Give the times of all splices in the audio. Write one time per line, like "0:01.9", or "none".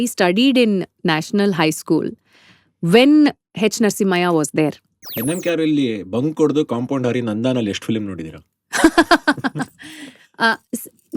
0:05.2